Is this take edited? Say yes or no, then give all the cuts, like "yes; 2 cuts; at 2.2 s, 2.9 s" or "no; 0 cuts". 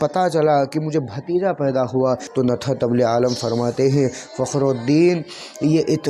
yes; 1 cut; at 2.2 s